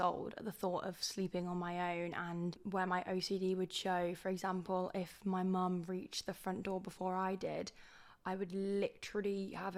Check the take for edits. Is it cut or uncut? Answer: uncut